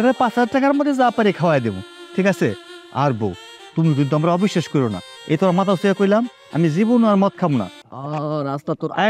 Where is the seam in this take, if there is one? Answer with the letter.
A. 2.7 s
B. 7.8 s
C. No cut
B